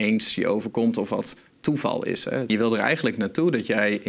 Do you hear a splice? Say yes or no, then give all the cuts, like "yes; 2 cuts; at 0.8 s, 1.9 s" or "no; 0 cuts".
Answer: yes; 1 cut; at 2.5 s